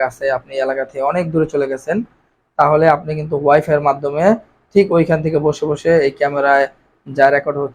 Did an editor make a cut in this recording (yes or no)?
no